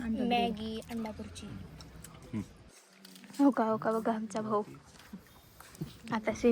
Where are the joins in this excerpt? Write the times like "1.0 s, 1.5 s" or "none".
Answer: 2.9 s